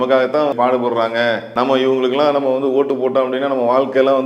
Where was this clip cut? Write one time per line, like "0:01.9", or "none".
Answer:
0:01.5